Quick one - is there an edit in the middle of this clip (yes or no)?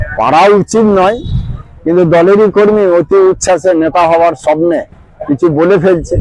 no